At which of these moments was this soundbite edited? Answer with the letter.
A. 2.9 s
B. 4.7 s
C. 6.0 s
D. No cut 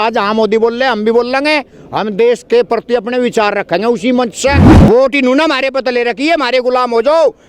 B